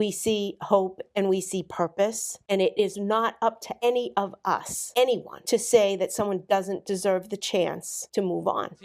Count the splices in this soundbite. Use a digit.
5